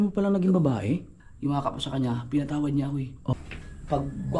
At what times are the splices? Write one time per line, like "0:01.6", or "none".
0:01.1
0:03.3